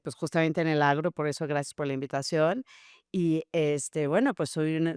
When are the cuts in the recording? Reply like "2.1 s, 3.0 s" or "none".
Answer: none